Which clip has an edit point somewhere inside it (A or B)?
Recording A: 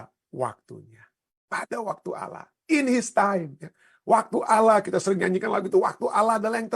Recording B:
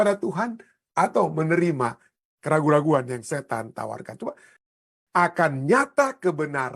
B